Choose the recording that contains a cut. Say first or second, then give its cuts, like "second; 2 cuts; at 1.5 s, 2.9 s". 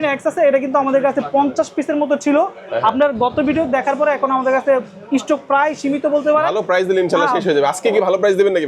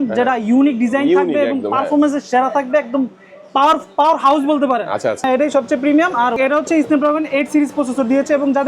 second; 2 cuts; at 5.2 s, 6.4 s